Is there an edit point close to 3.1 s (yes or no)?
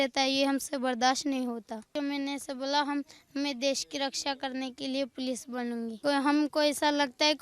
no